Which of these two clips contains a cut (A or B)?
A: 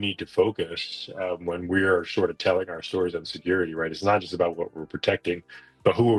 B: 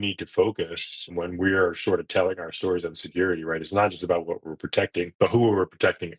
B